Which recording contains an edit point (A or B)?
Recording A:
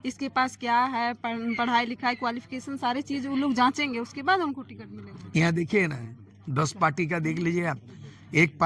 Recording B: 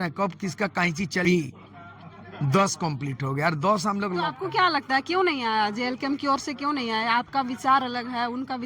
B